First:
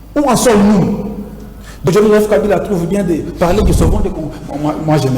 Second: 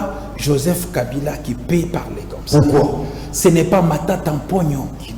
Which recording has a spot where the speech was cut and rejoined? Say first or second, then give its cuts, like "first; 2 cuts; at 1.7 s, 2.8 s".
first; 1 cut; at 1.7 s